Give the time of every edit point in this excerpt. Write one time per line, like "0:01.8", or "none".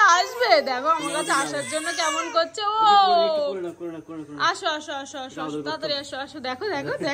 none